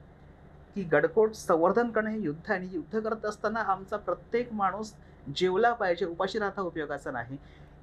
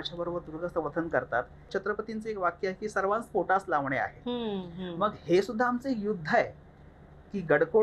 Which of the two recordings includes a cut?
second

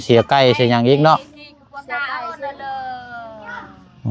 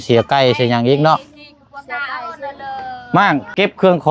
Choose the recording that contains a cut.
second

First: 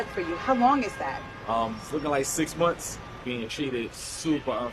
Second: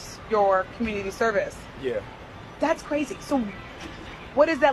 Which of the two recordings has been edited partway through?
first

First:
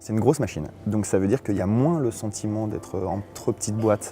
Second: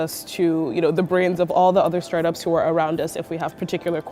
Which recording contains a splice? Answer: first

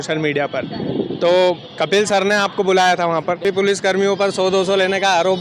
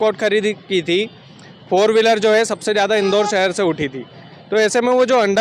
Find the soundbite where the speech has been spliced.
first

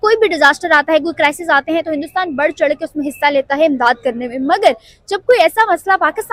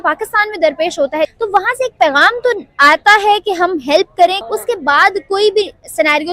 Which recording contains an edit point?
second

